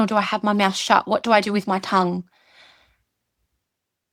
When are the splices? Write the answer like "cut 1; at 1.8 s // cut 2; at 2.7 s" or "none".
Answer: none